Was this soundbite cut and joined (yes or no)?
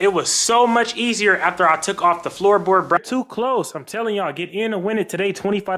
yes